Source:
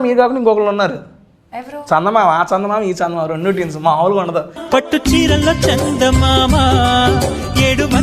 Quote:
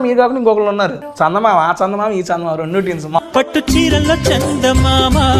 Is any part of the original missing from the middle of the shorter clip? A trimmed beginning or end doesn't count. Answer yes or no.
yes